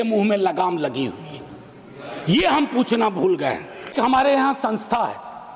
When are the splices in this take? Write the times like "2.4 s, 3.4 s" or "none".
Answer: 3.9 s